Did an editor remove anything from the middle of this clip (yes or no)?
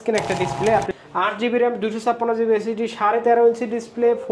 yes